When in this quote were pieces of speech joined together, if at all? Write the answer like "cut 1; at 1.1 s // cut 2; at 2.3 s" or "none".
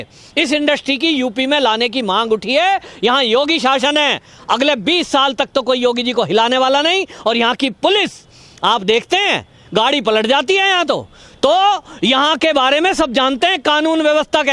none

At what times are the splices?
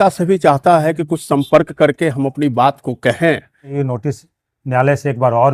cut 1; at 3.7 s

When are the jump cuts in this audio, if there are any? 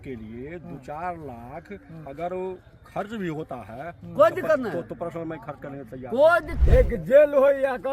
cut 1; at 6.5 s

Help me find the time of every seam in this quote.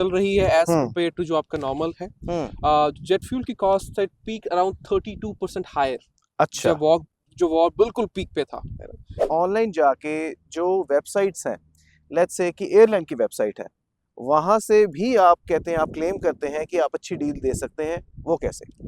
cut 1; at 9.1 s

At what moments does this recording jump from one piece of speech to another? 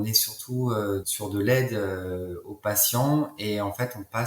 cut 1; at 1.1 s

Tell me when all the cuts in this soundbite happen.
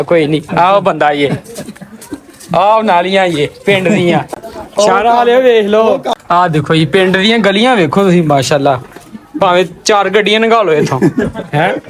cut 1; at 4.3 s // cut 2; at 6.2 s

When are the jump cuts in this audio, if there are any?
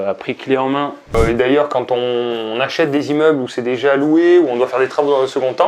cut 1; at 1.1 s

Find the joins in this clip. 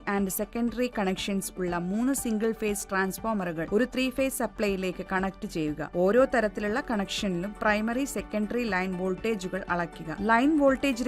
cut 1; at 3.6 s // cut 2; at 5.8 s

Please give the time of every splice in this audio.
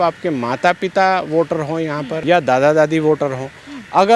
cut 1; at 2.1 s

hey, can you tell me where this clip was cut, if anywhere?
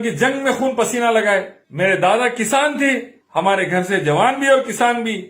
cut 1; at 1.6 s // cut 2; at 3.1 s

